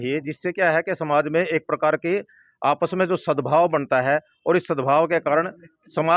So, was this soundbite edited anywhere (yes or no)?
no